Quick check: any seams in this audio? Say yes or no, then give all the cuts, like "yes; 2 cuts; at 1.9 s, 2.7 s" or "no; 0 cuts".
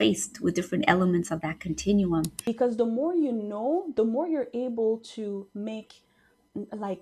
yes; 1 cut; at 2.4 s